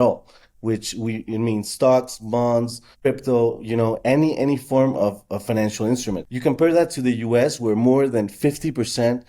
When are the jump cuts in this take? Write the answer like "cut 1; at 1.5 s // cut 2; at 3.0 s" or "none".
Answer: cut 1; at 2.9 s // cut 2; at 6.3 s